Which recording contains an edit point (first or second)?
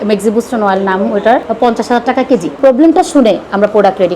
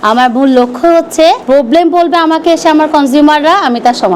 first